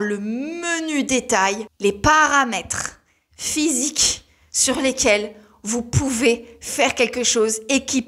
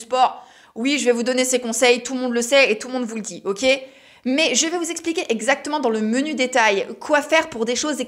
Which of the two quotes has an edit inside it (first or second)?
first